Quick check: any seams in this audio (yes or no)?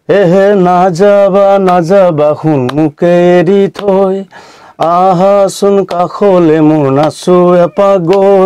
no